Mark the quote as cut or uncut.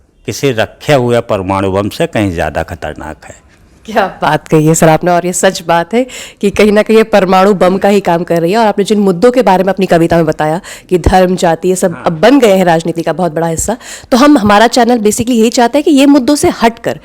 uncut